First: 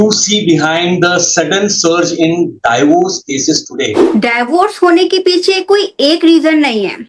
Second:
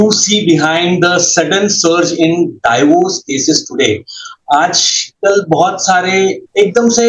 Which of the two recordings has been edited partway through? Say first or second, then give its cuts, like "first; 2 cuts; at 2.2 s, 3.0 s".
first; 1 cut; at 4.0 s